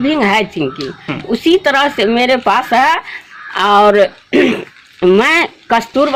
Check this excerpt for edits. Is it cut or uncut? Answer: uncut